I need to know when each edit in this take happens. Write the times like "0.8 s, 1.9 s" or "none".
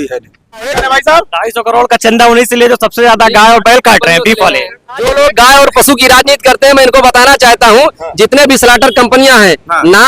0.8 s, 5.1 s